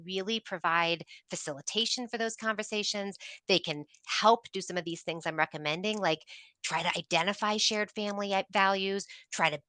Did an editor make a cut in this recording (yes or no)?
no